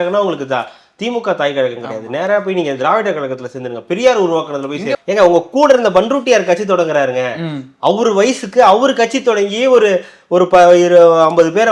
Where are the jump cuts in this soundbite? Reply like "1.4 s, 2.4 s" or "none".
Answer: 4.9 s